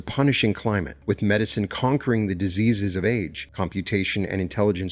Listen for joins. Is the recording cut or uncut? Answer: cut